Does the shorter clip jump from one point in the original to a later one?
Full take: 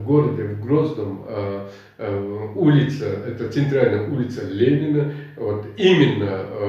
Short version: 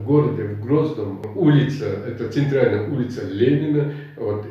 yes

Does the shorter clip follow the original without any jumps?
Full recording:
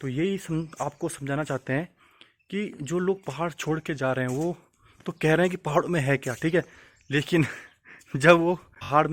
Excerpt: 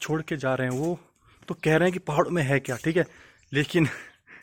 yes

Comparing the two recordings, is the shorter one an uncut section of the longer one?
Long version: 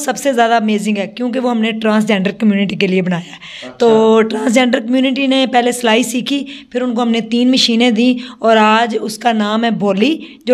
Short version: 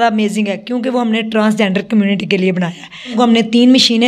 no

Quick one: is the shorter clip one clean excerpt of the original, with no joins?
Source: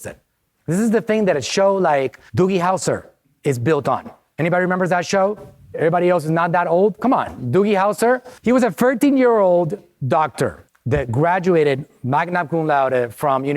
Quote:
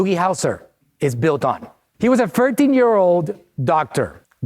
no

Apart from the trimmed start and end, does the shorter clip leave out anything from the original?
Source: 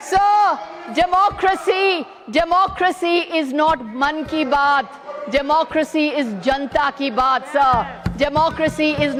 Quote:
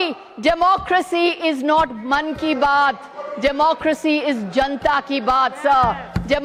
no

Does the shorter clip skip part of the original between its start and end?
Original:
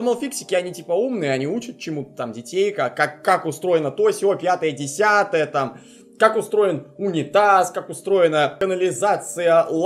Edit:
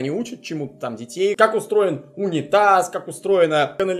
yes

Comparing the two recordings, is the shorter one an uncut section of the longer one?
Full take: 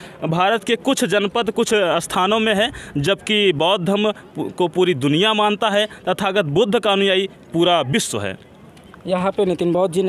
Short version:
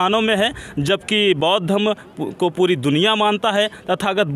yes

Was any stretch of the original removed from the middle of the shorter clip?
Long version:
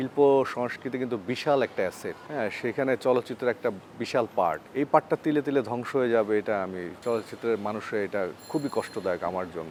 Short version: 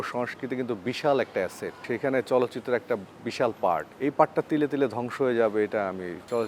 yes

